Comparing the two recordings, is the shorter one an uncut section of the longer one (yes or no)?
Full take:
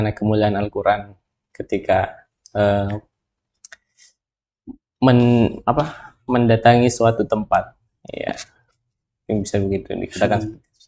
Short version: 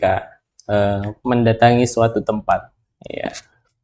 no